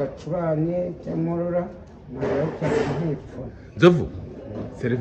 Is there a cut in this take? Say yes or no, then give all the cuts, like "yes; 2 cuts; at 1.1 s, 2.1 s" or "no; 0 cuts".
no; 0 cuts